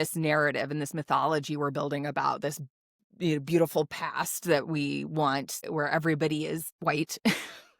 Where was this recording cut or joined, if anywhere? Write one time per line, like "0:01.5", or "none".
0:05.6
0:06.7